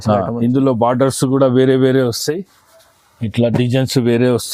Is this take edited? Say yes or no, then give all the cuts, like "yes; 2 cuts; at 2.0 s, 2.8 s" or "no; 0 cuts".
no; 0 cuts